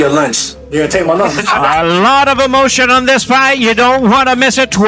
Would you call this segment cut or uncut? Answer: cut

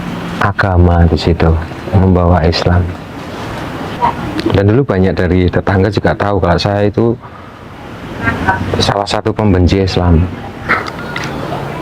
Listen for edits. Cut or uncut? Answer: cut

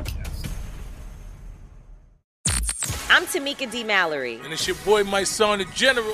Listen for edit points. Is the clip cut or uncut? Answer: uncut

